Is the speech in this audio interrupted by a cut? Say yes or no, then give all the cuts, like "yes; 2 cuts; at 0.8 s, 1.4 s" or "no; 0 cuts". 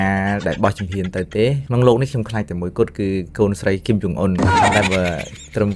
yes; 2 cuts; at 1.6 s, 4.7 s